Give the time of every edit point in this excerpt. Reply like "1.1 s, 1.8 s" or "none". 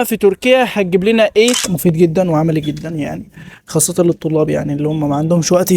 1.6 s